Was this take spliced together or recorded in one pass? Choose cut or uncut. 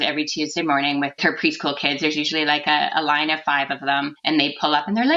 cut